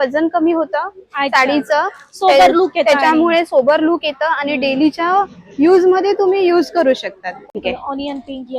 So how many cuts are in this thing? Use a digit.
1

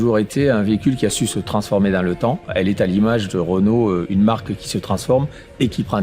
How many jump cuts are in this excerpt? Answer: 1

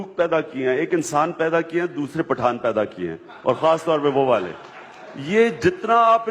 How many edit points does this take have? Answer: 0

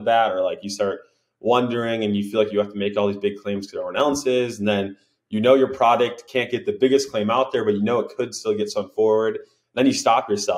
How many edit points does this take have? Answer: 0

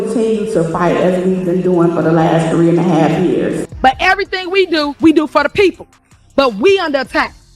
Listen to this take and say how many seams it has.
1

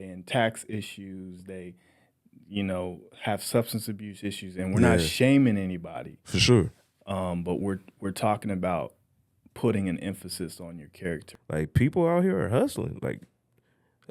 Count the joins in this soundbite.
1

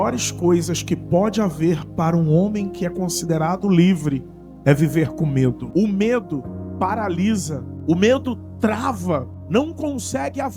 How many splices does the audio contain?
3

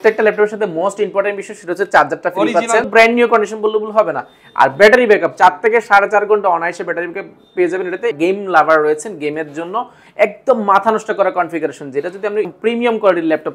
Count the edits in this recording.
3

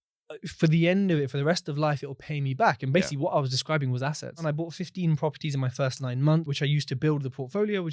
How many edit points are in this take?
2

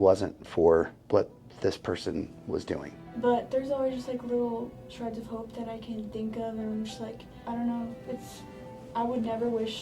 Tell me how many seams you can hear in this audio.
3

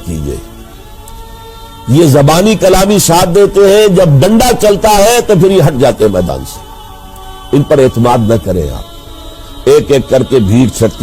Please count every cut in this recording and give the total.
1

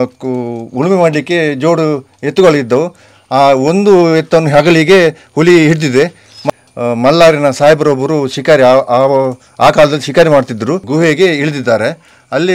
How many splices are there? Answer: 2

